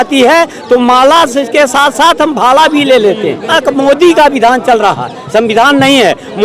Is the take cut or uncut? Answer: cut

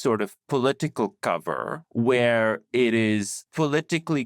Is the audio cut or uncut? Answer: cut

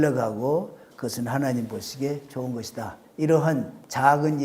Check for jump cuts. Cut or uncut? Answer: cut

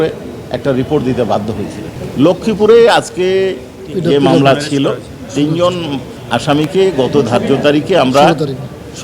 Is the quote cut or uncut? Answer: cut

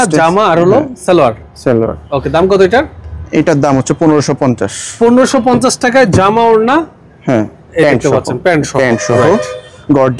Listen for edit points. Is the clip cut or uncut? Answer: uncut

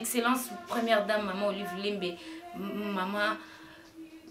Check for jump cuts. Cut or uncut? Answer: uncut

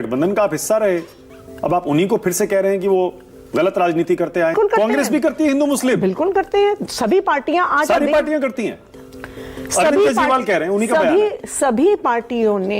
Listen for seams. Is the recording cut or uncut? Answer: cut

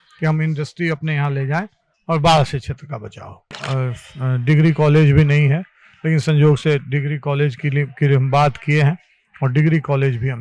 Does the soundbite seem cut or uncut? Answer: cut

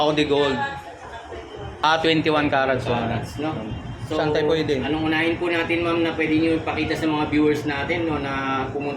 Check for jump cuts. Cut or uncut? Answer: cut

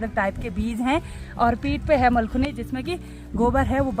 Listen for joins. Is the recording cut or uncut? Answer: uncut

